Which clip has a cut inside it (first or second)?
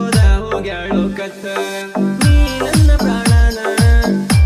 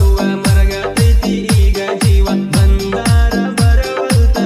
second